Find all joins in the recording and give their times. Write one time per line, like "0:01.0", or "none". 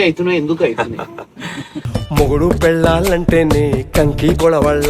none